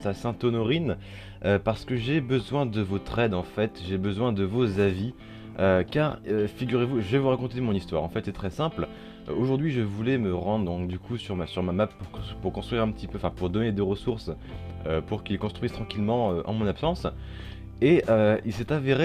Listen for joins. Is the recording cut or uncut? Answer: uncut